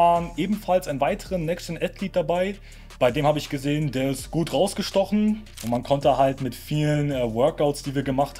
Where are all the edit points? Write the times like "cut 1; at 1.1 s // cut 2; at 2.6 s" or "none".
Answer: cut 1; at 5.5 s